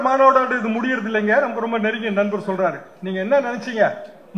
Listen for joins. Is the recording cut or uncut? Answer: uncut